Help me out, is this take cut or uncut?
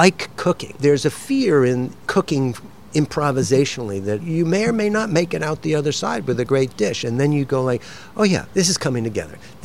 cut